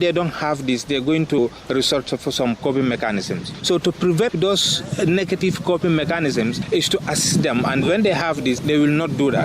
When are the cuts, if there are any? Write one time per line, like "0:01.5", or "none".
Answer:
0:01.4
0:04.3